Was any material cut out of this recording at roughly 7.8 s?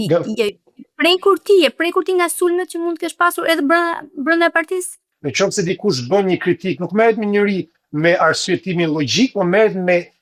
no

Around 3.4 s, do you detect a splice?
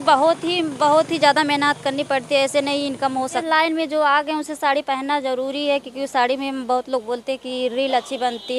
yes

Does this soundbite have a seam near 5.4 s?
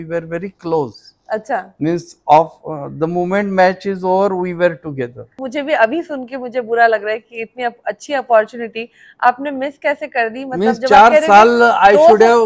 yes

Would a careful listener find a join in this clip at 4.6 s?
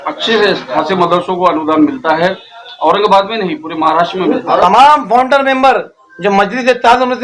yes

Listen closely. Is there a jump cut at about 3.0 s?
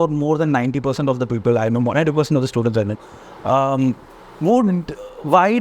no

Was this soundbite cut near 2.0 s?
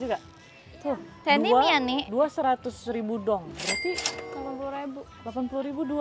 no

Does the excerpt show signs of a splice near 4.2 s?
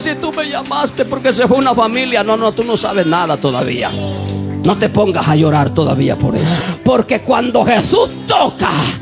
no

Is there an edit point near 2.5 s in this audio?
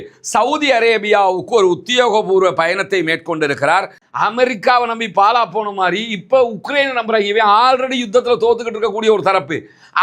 no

